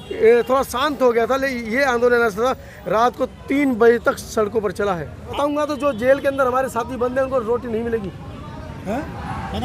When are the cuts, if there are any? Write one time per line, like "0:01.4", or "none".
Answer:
0:05.3